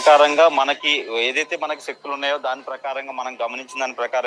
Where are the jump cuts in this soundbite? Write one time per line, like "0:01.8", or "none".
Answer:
none